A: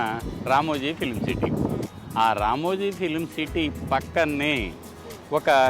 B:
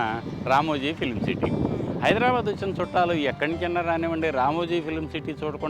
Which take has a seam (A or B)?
A